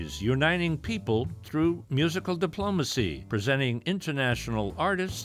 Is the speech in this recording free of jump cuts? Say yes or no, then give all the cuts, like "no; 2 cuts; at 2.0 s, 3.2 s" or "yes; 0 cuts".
no; 1 cut; at 3.2 s